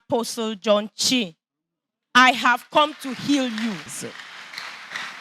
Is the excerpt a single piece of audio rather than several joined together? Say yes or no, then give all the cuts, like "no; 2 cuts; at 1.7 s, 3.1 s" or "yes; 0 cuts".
no; 1 cut; at 3.9 s